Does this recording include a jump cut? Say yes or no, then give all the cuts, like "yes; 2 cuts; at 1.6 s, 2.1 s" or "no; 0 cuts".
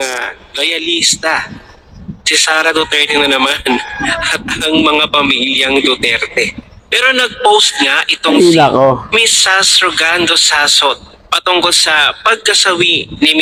no; 0 cuts